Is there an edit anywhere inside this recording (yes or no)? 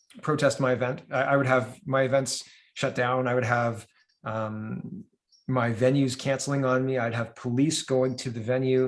no